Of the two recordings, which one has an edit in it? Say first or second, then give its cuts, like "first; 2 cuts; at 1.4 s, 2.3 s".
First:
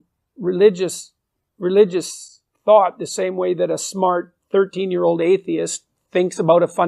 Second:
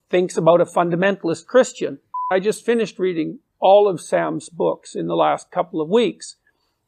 second; 1 cut; at 2.3 s